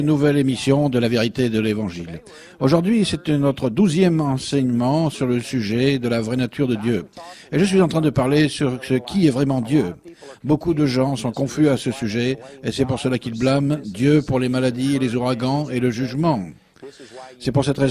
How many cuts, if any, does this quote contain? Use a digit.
1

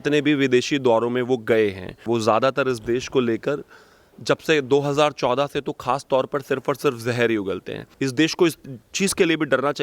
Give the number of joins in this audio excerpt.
2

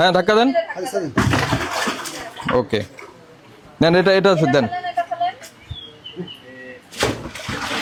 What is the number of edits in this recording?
0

